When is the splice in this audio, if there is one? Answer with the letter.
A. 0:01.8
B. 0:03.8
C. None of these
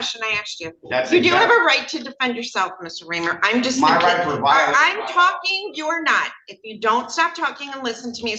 C